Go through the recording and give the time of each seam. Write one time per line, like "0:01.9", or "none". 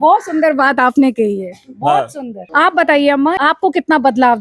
0:02.4
0:03.4